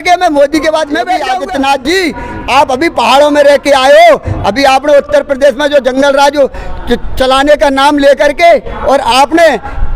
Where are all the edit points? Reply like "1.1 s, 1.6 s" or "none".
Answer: 1.3 s